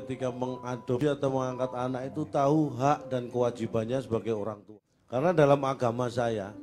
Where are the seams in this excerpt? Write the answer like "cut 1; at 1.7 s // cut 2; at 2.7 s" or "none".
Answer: cut 1; at 1.0 s // cut 2; at 4.6 s